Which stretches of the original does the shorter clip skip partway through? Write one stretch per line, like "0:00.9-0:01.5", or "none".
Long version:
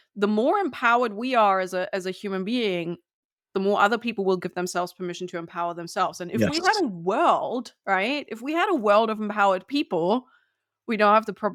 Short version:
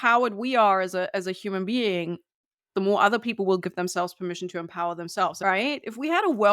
0:06.2-0:07.8